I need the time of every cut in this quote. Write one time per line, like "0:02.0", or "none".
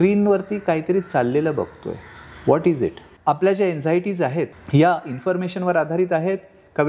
0:03.1
0:04.6